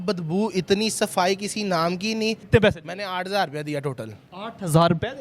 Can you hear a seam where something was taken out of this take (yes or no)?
yes